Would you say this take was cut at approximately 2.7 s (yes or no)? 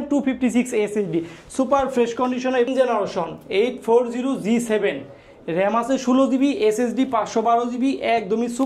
yes